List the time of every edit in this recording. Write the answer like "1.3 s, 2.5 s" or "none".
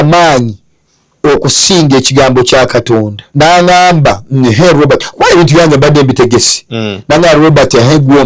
3.2 s